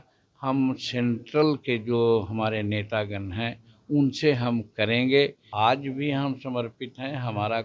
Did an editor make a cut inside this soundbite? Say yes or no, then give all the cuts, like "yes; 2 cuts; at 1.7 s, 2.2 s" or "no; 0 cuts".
yes; 1 cut; at 5.4 s